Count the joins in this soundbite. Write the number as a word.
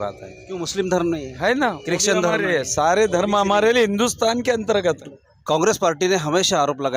one